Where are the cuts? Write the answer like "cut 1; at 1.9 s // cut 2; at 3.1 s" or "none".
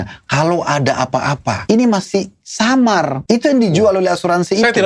cut 1; at 1.6 s // cut 2; at 3.2 s